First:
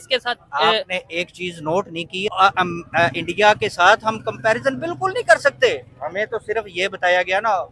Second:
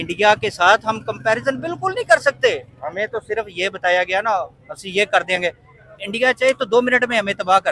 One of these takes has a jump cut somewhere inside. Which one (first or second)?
first